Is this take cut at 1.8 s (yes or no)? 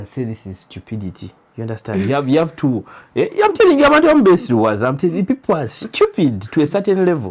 no